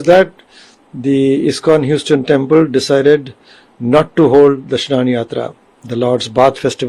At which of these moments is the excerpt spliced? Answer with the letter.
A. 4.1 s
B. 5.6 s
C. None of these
C